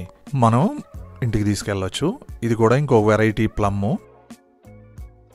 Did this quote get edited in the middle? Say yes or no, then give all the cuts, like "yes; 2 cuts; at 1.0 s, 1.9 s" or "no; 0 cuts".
no; 0 cuts